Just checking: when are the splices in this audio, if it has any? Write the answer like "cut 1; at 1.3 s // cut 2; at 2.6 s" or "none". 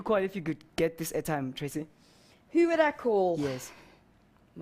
cut 1; at 1.6 s